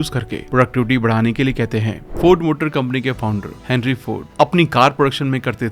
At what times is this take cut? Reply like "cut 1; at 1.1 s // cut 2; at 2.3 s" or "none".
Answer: cut 1; at 2.0 s

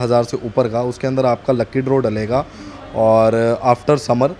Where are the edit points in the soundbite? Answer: none

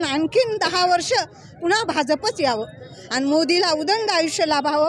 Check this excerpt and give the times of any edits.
cut 1; at 3.0 s

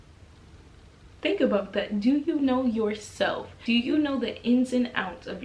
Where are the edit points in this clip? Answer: cut 1; at 1.2 s // cut 2; at 3.5 s

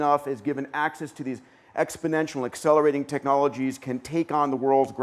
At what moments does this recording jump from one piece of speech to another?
none

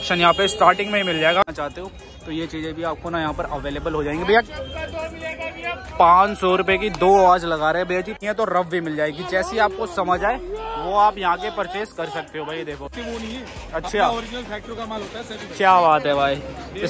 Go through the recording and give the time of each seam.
cut 1; at 1.4 s // cut 2; at 8.2 s // cut 3; at 12.9 s

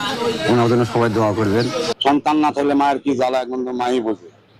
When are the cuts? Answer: cut 1; at 1.9 s

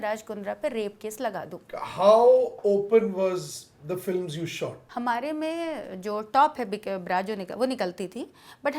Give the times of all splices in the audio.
cut 1; at 1.5 s // cut 2; at 4.8 s

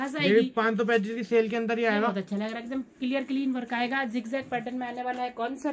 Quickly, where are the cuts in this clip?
none

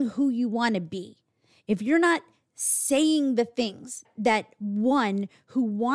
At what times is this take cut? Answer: cut 1; at 4.0 s

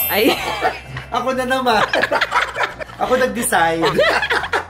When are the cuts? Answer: cut 1; at 2.8 s

